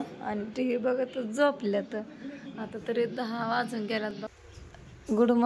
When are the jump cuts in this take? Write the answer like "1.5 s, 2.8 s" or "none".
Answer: 4.4 s